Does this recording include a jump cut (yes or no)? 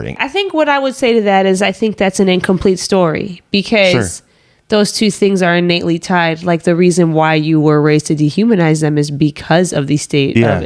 no